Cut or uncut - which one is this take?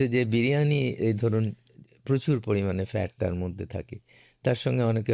uncut